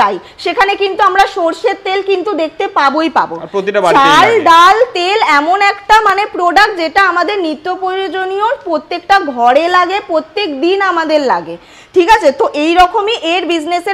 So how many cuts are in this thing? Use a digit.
0